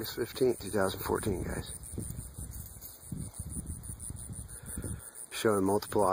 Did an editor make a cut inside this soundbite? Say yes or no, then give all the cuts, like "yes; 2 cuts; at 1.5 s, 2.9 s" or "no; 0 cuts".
no; 0 cuts